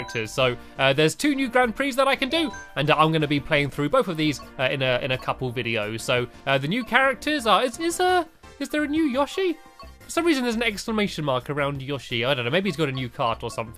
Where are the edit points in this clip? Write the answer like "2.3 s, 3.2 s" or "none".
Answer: none